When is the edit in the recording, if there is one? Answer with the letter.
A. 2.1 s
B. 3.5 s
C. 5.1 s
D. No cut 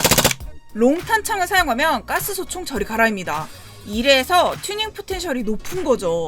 D